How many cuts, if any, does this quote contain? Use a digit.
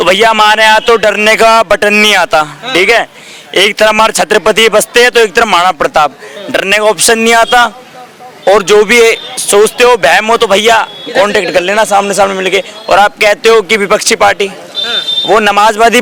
0